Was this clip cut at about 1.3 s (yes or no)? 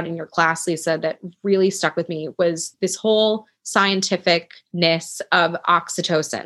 no